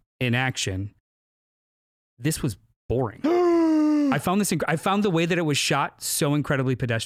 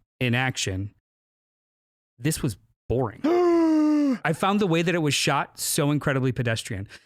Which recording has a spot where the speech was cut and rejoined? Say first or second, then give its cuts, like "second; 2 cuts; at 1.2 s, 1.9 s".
second; 1 cut; at 4.2 s